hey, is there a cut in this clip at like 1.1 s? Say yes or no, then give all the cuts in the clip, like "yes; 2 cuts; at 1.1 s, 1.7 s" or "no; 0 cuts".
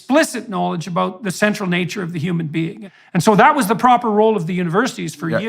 no; 1 cut; at 2.8 s